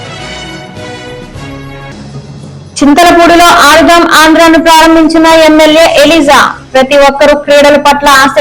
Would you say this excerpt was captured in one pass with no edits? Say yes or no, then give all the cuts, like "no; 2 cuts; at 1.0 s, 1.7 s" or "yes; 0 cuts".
no; 1 cut; at 1.9 s